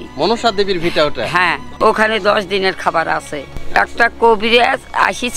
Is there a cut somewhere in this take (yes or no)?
yes